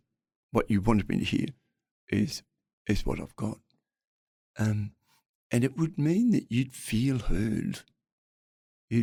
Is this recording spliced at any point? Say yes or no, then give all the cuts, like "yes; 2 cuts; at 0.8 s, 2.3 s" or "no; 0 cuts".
no; 0 cuts